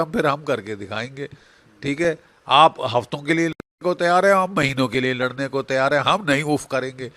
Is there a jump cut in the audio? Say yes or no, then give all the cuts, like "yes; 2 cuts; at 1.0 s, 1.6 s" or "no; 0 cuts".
no; 0 cuts